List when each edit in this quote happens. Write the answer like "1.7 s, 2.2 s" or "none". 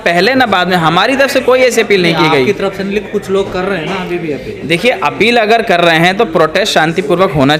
none